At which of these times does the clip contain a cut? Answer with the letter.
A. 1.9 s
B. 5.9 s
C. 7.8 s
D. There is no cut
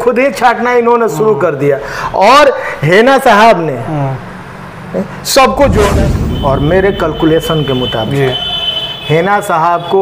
B